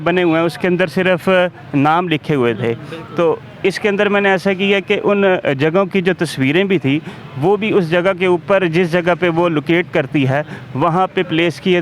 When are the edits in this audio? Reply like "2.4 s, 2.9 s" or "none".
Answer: none

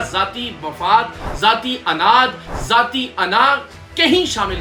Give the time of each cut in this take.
none

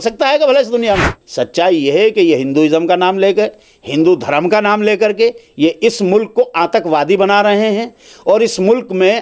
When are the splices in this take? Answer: 1.2 s

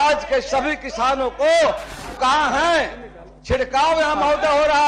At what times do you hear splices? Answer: 1.9 s

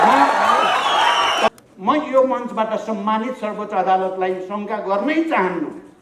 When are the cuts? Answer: 1.5 s

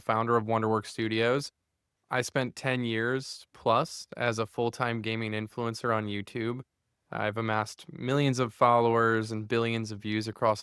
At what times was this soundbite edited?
none

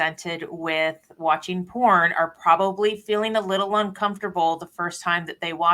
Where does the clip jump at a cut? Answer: none

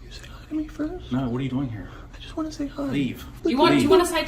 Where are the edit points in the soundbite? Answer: 1.2 s, 3.3 s

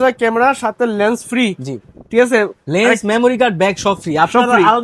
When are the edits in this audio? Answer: none

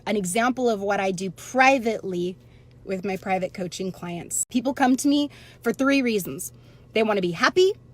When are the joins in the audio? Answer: 4.4 s

